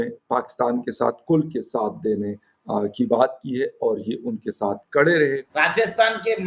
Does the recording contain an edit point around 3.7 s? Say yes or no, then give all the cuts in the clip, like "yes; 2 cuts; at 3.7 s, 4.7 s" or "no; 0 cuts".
no; 1 cut; at 5.5 s